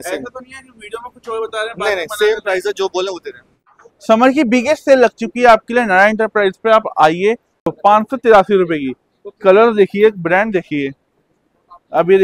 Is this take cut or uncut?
cut